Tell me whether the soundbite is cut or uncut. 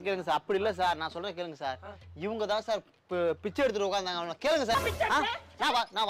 uncut